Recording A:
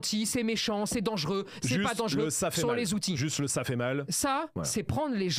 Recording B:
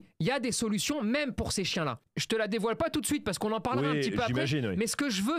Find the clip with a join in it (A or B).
B